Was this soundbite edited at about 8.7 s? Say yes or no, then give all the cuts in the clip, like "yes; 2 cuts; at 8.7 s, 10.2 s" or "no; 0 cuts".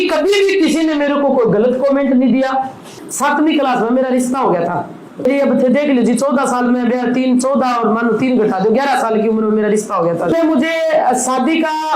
no; 3 cuts; at 2.9 s, 5.2 s, 10.3 s